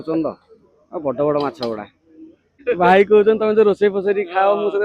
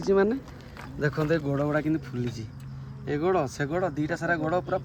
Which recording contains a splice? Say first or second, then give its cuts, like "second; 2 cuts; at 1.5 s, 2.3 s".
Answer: first; 1 cut; at 2.5 s